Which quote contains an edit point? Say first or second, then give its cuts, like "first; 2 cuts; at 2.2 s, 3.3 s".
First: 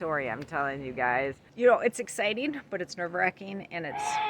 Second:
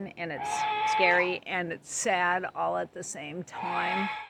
first; 1 cut; at 1.4 s